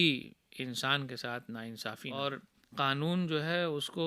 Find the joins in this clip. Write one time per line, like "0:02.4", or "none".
0:02.1

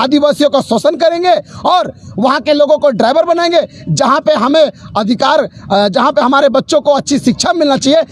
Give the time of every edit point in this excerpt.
none

